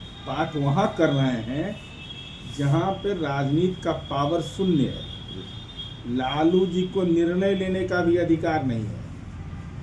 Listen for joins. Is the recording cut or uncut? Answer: uncut